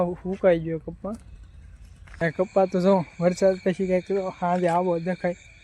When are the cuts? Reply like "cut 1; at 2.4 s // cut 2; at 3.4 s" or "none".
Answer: cut 1; at 2.2 s